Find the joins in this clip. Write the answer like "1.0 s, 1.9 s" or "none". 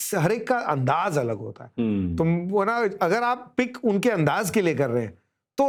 none